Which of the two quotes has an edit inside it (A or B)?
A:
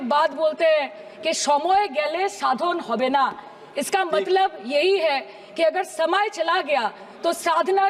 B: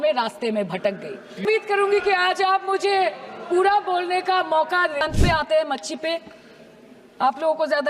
B